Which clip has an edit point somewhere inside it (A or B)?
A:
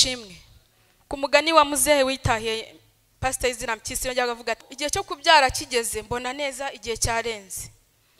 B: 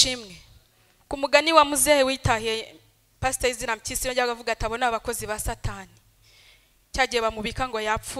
A